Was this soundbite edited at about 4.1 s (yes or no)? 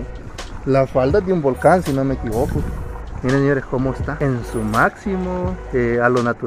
yes